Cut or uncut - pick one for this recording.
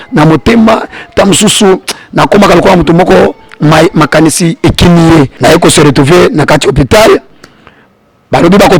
cut